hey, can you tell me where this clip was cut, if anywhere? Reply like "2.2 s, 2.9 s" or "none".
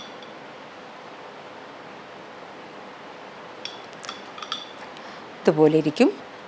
none